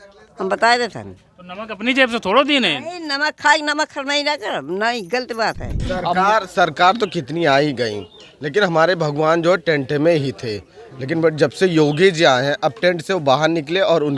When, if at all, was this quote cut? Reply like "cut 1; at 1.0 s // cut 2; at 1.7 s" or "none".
cut 1; at 5.7 s